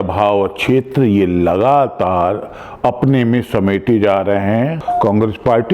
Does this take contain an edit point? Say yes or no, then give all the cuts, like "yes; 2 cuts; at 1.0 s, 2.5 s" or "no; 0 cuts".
yes; 1 cut; at 4.8 s